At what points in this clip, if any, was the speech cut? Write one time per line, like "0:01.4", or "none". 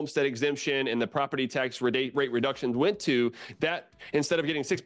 none